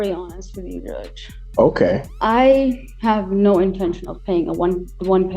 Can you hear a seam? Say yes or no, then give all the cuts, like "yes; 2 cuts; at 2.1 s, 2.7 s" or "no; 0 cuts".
yes; 1 cut; at 2.1 s